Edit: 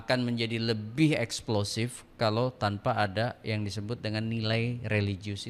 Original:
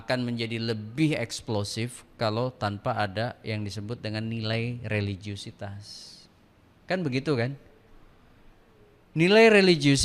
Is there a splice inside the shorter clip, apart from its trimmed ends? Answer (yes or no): no